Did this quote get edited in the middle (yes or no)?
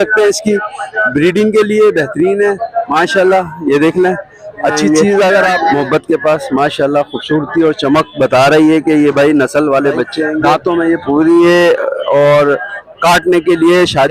yes